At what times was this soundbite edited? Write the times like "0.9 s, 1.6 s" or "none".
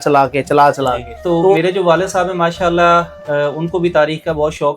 1.1 s

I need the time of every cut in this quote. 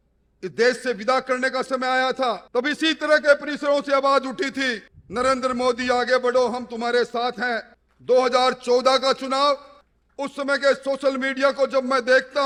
none

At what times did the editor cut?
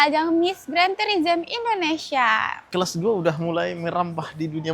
2.6 s

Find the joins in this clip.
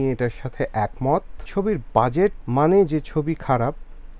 1.4 s, 2.4 s

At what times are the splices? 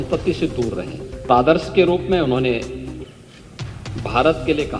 1.3 s

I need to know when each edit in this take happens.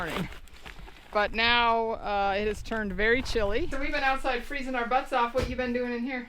3.7 s

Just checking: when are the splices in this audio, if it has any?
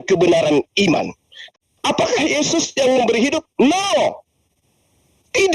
1.4 s

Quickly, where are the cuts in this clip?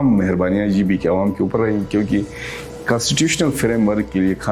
none

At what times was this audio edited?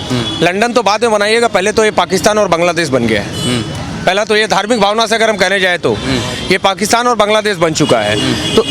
none

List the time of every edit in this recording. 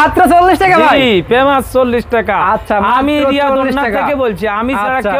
none

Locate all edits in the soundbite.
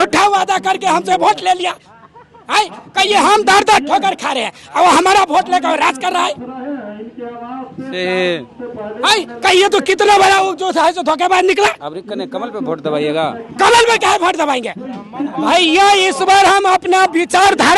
none

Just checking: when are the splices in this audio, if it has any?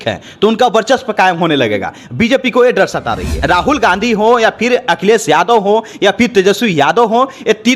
3.4 s

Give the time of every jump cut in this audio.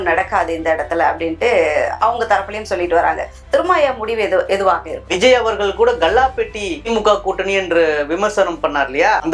5.1 s

